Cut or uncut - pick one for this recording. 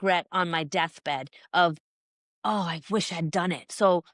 uncut